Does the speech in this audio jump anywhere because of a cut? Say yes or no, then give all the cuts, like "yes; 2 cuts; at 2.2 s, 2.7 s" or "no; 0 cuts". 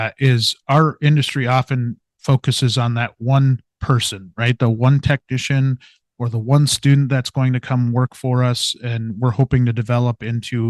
no; 0 cuts